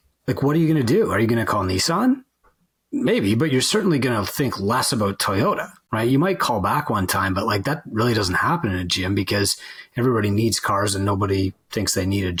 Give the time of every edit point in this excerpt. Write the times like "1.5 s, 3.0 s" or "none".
none